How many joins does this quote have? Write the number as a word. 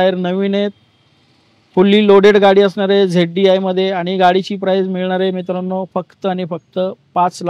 zero